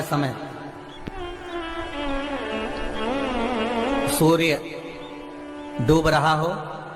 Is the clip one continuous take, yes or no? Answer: yes